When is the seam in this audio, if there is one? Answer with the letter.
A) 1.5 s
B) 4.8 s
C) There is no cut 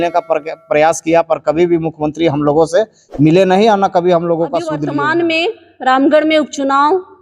B